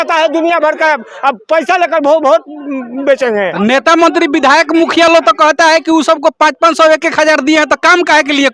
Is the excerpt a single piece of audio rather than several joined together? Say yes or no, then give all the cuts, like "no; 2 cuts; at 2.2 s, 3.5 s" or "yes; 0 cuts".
yes; 0 cuts